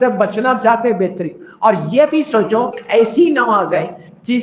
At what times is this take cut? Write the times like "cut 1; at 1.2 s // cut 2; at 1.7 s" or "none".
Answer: cut 1; at 2.8 s